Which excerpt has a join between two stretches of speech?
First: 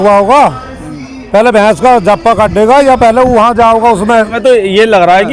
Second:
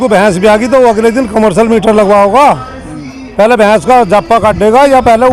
first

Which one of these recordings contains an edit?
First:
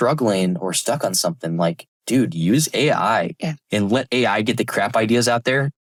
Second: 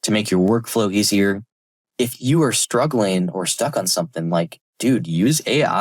second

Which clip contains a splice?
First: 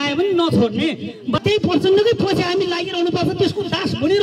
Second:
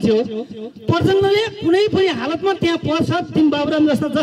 first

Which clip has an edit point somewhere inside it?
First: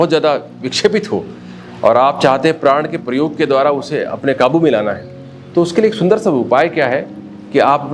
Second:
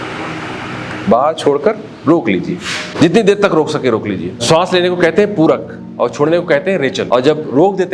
second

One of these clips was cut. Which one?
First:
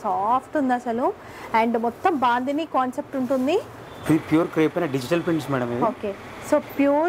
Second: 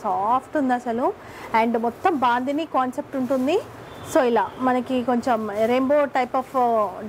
first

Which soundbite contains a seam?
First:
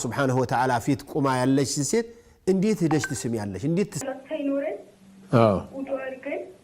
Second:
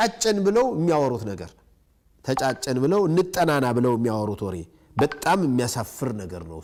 first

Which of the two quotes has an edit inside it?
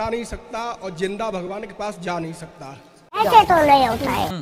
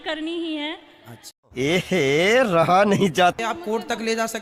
second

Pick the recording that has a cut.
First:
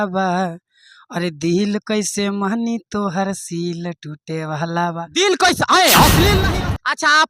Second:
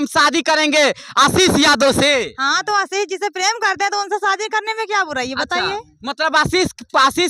first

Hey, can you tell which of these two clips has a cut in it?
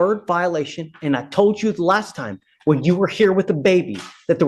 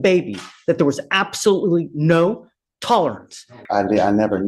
second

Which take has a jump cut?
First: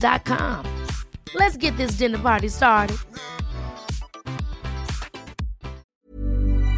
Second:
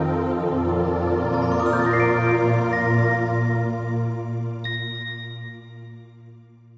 first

